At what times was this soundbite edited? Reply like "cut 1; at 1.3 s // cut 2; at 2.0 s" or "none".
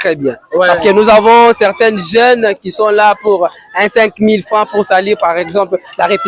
none